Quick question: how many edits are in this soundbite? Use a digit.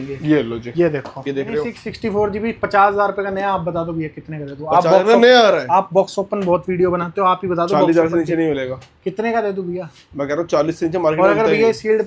1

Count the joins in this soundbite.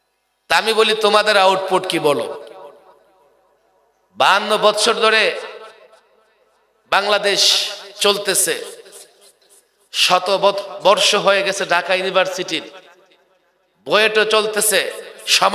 0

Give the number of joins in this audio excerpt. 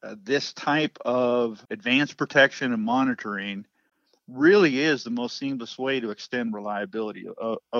1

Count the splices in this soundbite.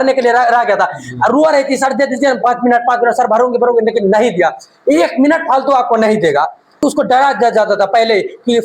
1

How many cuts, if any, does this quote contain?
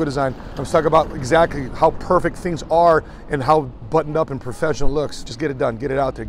1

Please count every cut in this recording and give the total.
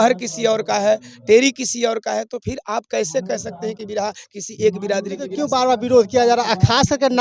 1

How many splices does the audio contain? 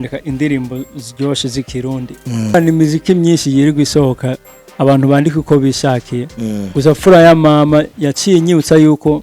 1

